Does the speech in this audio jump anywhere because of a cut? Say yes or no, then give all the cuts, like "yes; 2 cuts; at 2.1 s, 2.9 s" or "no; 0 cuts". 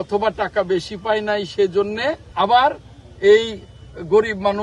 yes; 1 cut; at 2.2 s